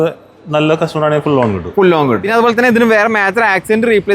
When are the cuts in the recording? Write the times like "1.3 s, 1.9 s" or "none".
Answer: 2.2 s